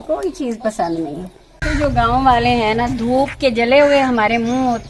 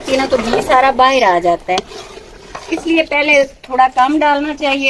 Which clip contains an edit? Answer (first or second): first